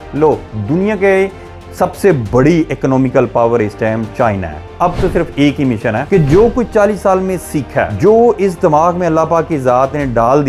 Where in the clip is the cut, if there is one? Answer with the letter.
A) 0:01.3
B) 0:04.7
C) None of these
B